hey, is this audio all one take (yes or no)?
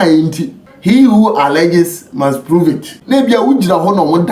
no